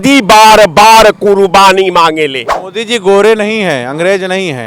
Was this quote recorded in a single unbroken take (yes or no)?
no